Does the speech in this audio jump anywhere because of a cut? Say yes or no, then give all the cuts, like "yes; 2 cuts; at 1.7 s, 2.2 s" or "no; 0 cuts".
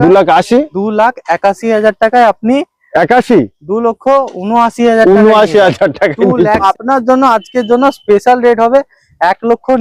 yes; 1 cut; at 6.6 s